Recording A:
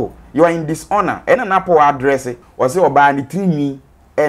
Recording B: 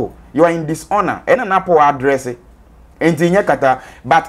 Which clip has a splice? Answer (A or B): A